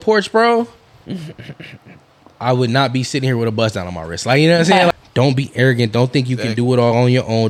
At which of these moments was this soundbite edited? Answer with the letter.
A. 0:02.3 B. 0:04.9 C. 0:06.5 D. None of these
B